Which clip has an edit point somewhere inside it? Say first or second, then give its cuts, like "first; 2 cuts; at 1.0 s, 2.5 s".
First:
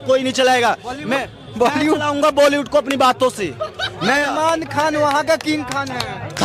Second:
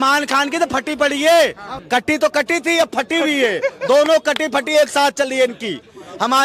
second; 1 cut; at 1.7 s